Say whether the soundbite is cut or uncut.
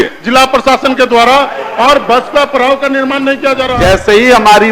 cut